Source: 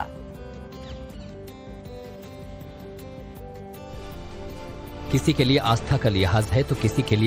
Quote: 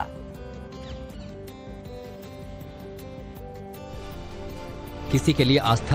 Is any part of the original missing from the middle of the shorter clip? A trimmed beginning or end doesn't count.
no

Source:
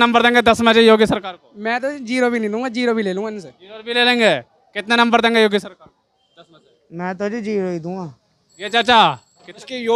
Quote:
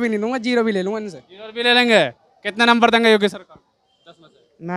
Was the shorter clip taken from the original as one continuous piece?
yes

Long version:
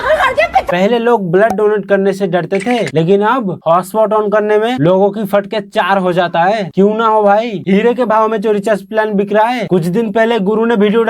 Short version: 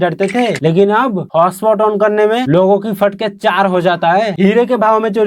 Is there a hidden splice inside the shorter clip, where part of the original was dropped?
yes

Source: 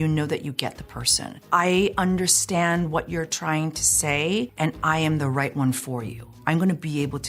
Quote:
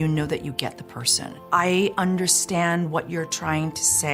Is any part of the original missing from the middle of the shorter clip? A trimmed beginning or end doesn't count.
no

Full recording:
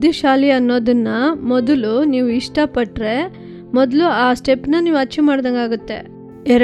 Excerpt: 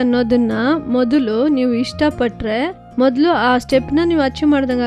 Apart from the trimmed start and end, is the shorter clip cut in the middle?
yes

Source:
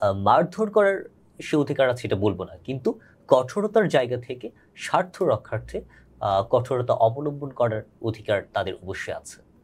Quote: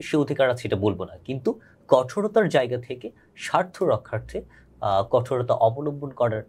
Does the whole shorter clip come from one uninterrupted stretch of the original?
yes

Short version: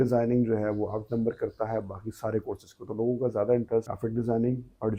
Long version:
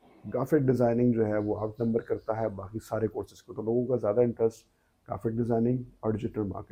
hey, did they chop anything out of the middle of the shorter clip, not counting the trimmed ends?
yes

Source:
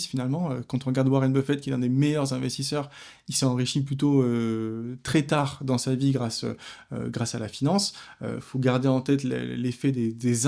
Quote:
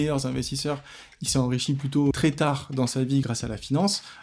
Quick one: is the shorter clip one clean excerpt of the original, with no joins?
no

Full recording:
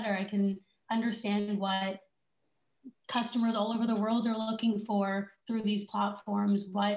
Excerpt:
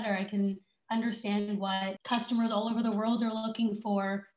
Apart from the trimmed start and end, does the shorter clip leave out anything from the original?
yes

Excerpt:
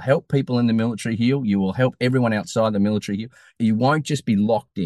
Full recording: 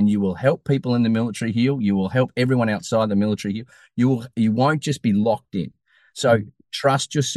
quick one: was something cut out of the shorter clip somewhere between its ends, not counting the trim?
yes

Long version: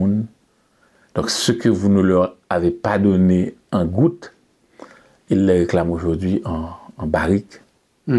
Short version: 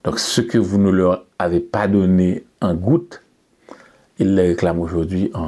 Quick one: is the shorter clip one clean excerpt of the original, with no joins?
yes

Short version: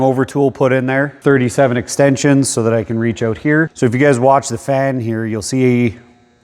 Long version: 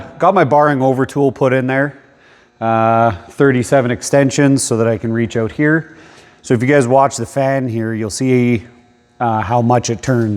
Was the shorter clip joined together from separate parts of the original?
yes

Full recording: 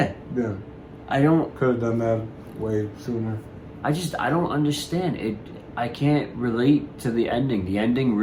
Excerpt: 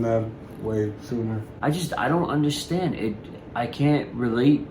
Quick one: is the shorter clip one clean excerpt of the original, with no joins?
no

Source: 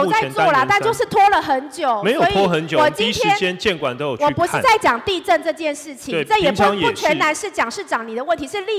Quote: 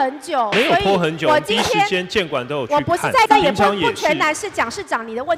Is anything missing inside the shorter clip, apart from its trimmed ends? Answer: yes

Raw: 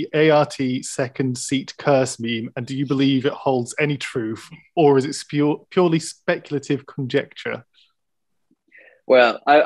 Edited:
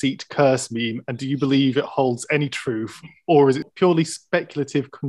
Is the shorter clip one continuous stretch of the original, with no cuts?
no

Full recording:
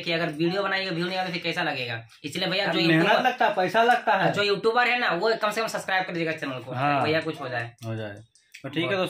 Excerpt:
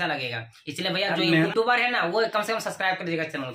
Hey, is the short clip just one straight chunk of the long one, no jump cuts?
no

